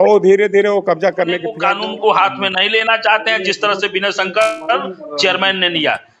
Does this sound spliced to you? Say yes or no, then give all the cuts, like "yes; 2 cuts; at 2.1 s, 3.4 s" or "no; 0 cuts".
yes; 1 cut; at 1.5 s